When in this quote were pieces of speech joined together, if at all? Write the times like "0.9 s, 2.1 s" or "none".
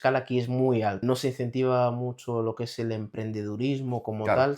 1.0 s